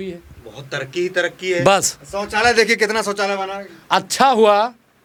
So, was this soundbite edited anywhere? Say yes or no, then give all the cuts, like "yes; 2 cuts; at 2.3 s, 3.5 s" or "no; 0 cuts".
no; 0 cuts